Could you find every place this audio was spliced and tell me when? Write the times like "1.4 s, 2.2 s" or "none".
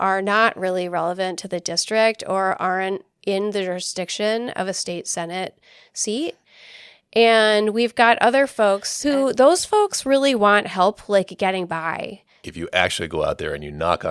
8.9 s, 12.4 s